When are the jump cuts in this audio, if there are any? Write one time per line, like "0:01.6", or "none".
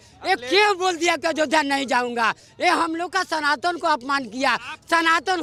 none